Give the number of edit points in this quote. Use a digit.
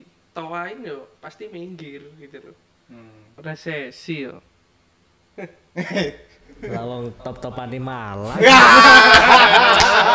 1